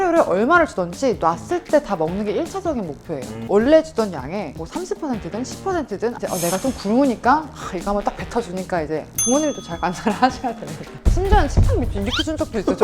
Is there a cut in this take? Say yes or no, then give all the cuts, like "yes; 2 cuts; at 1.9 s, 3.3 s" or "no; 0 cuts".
yes; 3 cuts; at 3.4 s, 6.2 s, 9.1 s